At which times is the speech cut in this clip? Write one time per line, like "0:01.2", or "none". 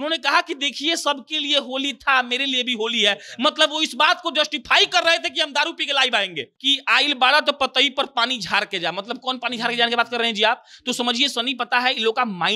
0:06.5